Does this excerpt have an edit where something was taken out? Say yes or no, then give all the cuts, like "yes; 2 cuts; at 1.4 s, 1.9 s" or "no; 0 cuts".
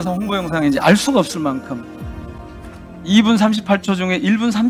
no; 0 cuts